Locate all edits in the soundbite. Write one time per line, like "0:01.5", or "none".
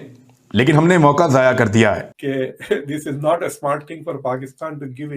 0:02.1